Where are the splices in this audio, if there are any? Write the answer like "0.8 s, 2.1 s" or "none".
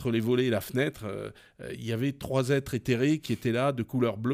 none